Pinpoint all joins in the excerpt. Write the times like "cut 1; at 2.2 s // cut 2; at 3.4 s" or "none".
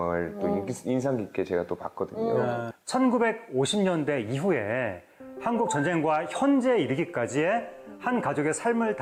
none

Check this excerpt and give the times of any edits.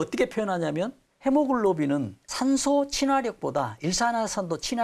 cut 1; at 1.0 s // cut 2; at 2.2 s

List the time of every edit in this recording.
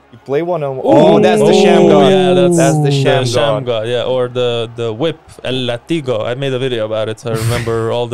none

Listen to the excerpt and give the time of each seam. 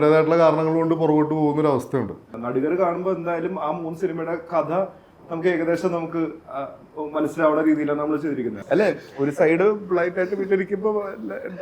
cut 1; at 2.3 s // cut 2; at 8.6 s

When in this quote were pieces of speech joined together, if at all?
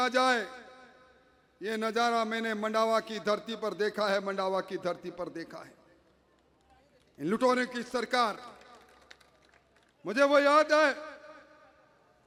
none

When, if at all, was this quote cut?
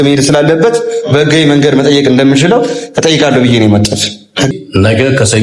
cut 1; at 4.5 s

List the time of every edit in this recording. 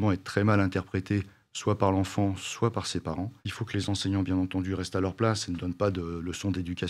cut 1; at 3.4 s

